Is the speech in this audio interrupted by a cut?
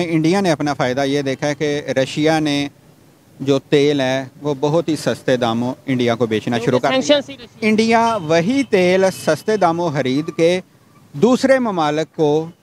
no; 0 cuts

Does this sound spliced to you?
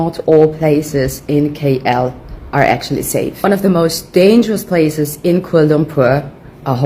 no; 0 cuts

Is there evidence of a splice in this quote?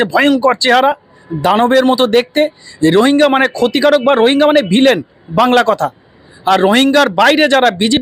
no; 0 cuts

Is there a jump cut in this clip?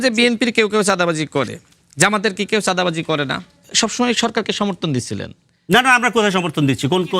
yes; 1 cut; at 3.7 s

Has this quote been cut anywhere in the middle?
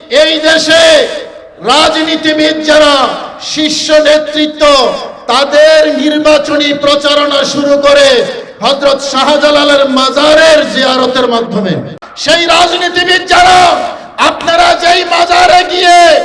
yes; 1 cut; at 12.1 s

